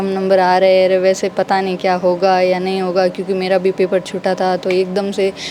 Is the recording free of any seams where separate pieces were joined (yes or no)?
yes